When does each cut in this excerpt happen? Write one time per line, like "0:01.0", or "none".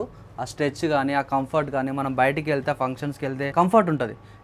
0:03.5